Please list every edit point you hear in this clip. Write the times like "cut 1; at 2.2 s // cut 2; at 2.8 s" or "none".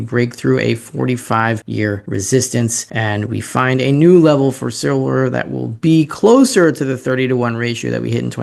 cut 1; at 1.9 s // cut 2; at 2.8 s